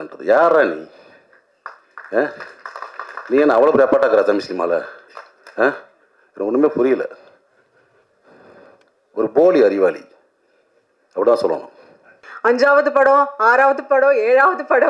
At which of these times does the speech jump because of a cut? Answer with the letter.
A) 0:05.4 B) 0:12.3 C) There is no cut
B